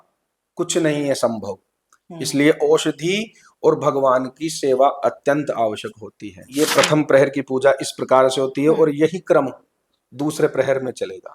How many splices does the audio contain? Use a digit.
1